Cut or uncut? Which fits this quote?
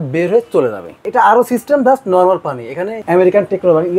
cut